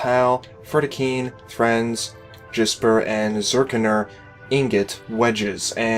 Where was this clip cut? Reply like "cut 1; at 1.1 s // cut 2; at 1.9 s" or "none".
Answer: cut 1; at 3.1 s